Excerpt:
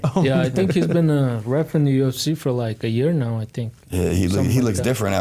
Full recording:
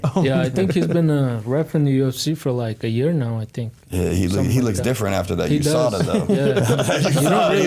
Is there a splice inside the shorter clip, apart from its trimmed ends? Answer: no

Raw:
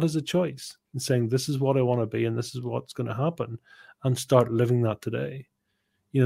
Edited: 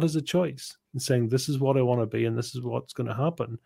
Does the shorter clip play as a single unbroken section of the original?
yes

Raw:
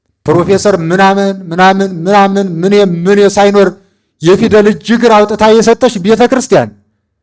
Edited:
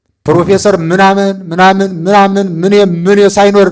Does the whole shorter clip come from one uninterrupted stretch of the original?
yes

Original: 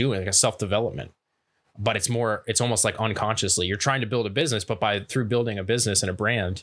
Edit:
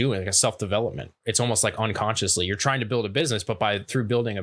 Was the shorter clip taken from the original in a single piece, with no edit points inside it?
no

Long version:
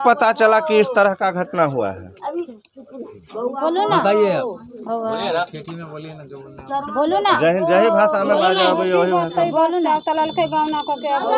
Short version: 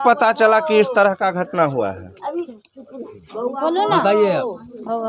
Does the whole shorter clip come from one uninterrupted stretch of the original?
yes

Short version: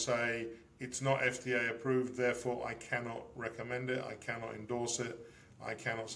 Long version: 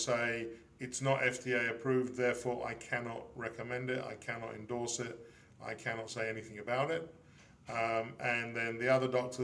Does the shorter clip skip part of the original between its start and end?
no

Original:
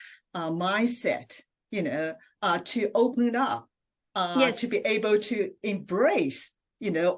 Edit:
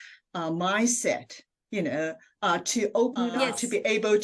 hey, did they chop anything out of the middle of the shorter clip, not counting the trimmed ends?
yes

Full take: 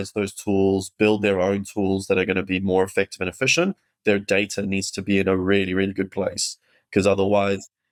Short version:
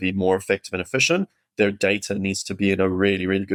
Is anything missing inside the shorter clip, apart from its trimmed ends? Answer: no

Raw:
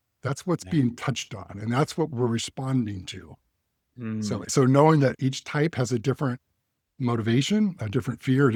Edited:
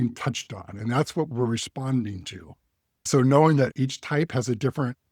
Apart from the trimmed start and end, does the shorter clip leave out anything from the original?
yes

